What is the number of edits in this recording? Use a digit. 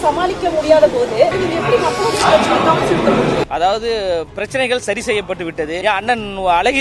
3